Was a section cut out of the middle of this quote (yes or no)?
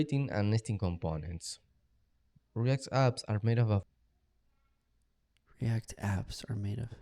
no